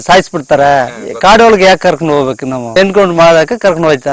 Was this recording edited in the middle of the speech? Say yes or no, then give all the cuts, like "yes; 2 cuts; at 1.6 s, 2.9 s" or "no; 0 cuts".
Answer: yes; 1 cut; at 2.8 s